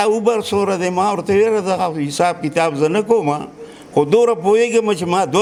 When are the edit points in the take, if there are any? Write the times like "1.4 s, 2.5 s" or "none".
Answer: none